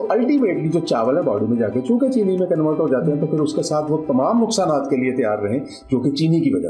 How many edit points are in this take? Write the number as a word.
zero